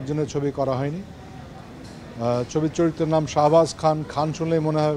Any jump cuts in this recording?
no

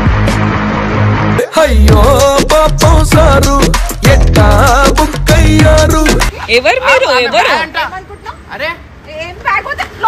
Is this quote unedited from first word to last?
no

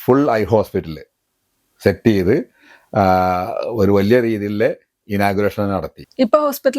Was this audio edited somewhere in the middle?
no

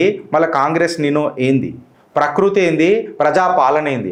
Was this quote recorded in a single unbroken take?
yes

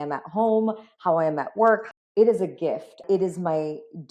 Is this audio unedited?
no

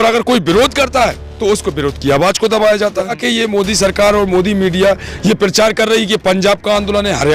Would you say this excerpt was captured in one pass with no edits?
no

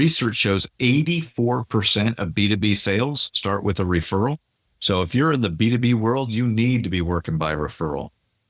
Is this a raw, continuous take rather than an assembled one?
yes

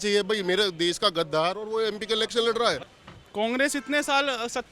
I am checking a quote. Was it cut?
yes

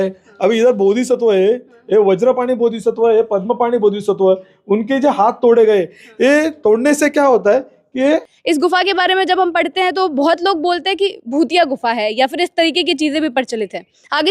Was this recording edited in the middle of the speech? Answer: yes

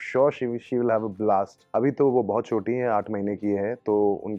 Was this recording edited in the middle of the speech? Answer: yes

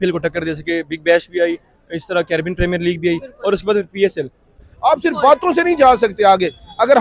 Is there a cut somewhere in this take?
yes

